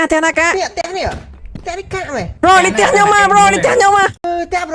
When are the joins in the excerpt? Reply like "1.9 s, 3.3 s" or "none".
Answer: none